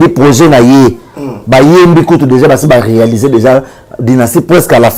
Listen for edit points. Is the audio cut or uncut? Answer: uncut